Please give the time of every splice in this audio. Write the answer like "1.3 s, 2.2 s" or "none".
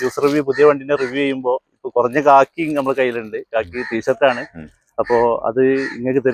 none